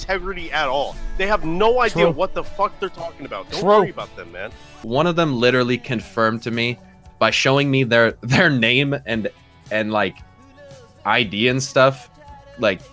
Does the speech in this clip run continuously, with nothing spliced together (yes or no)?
no